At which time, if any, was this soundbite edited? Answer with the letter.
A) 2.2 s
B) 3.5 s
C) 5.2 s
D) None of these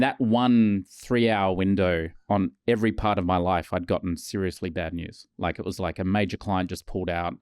A